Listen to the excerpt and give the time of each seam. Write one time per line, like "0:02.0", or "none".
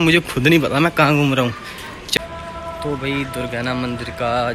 0:02.2